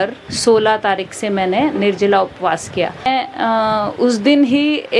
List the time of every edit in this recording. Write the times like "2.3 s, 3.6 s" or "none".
3.1 s